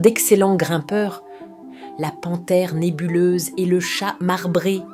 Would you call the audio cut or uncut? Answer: uncut